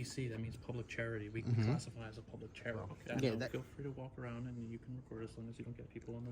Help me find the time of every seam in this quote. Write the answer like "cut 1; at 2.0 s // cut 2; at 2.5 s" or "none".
cut 1; at 3.4 s